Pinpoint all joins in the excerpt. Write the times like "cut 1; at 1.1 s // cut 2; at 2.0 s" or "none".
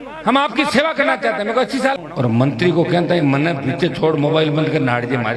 cut 1; at 2.0 s